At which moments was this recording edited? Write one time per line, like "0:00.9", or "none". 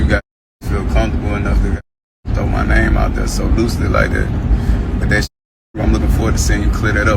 0:03.9

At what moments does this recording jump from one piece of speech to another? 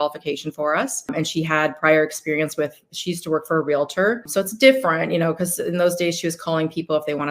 0:01.1
0:04.3

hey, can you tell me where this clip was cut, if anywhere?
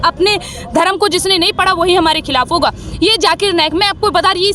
none

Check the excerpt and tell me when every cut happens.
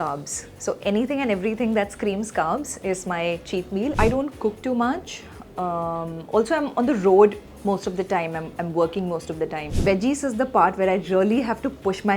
0:03.9
0:09.7

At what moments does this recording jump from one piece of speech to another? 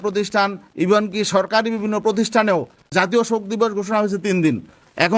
0:02.8

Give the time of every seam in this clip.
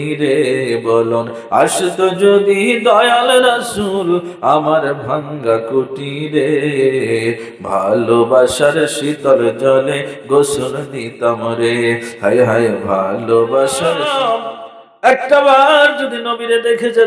0:14.1

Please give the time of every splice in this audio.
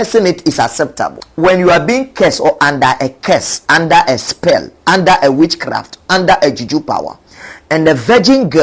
0:01.2

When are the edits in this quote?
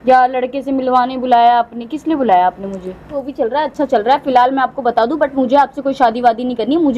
0:03.2

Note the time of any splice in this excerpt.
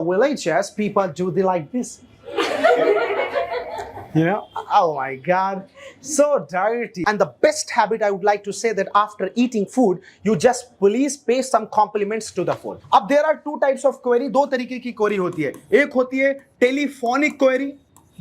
0:07.0
0:12.7

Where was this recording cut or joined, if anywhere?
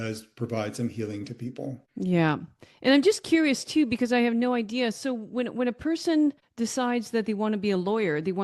0:01.8
0:06.5

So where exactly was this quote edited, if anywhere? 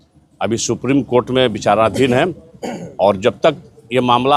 none

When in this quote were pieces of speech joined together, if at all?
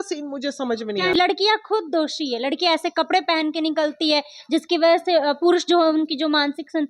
0:01.1

